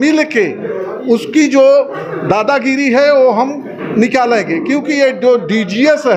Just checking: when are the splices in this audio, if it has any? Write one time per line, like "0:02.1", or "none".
none

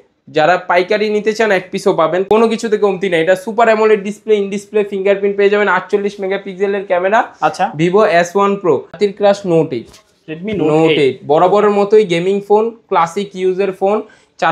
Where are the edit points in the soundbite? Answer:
0:02.3
0:09.0

